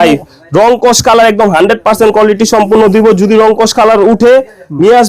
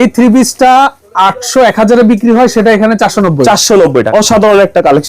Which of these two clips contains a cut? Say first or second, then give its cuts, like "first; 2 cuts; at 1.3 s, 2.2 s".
second; 1 cut; at 4.1 s